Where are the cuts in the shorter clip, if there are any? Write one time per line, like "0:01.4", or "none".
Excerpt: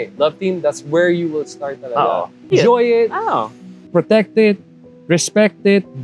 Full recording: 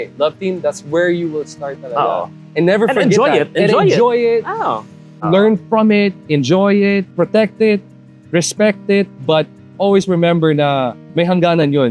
0:02.5
0:03.8